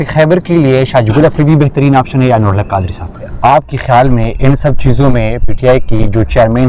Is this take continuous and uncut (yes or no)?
no